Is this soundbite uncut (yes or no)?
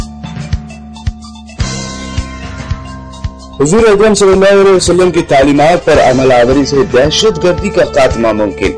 no